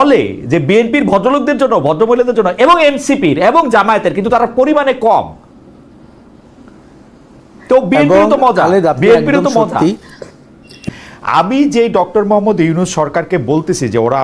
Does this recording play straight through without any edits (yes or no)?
no